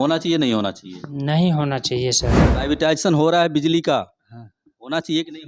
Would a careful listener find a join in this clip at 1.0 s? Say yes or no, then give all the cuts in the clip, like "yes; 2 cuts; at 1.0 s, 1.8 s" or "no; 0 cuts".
no; 1 cut; at 2.5 s